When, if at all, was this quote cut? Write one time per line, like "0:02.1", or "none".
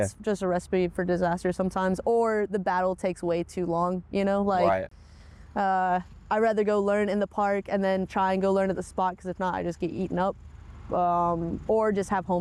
none